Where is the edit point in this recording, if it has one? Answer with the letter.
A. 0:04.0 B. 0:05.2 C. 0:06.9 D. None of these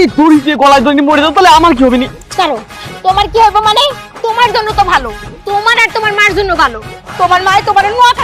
D